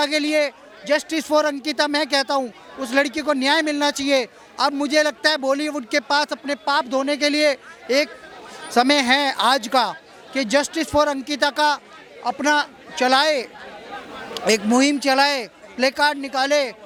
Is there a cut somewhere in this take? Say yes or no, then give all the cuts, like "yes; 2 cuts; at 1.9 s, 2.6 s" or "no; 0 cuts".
no; 0 cuts